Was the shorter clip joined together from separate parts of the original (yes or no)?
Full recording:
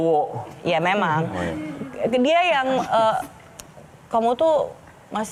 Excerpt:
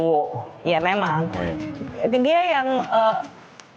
no